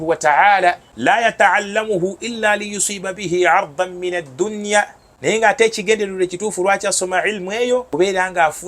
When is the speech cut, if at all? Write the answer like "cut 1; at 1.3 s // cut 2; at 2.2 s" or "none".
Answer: cut 1; at 1.2 s // cut 2; at 5.3 s // cut 3; at 7.9 s